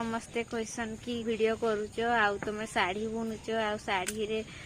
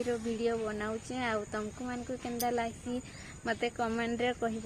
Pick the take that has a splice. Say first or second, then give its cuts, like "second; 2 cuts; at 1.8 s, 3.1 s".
first; 1 cut; at 1.2 s